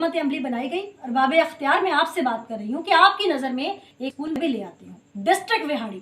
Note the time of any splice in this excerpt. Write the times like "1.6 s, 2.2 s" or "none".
1.0 s, 5.1 s